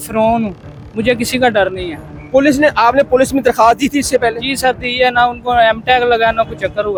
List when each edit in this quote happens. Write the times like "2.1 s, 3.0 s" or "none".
none